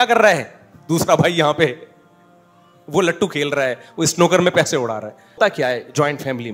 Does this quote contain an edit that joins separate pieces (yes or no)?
yes